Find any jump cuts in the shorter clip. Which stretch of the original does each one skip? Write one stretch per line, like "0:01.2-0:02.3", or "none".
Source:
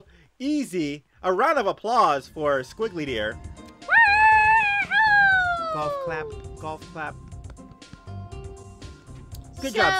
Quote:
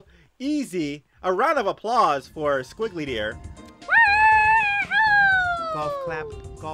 none